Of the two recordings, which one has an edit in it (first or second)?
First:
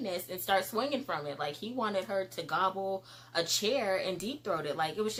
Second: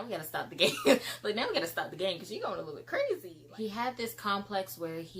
second